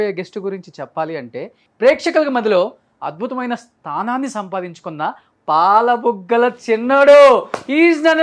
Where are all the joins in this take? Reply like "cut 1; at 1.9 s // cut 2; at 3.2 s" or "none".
cut 1; at 1.6 s